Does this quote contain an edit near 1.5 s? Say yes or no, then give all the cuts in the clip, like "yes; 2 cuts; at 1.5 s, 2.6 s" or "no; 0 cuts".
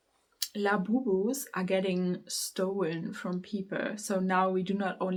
no; 0 cuts